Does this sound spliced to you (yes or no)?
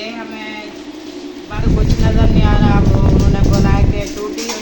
yes